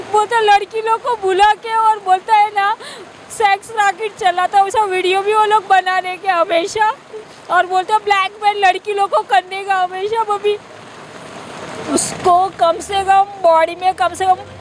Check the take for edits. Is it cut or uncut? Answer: cut